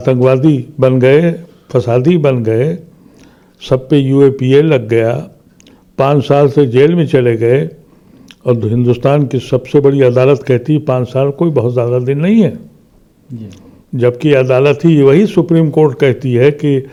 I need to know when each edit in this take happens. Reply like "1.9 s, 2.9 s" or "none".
none

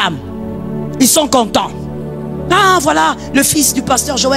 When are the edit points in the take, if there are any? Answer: none

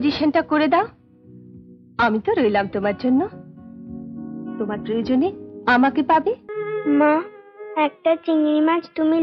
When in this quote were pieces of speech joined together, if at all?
6.5 s

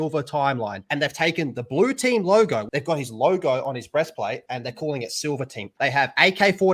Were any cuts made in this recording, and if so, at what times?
2.7 s, 5.7 s

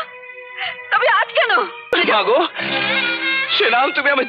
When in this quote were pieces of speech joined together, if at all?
1.9 s

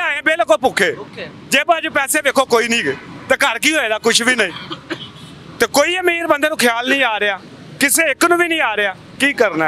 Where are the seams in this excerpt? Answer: none

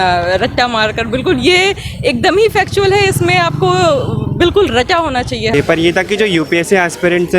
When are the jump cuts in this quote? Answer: 5.5 s

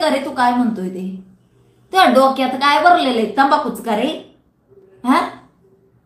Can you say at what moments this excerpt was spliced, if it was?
none

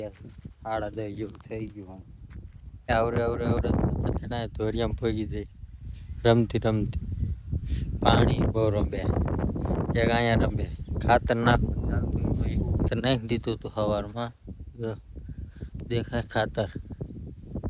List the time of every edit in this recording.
2.9 s, 12.9 s

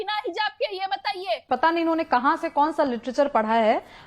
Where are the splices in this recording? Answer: 1.4 s

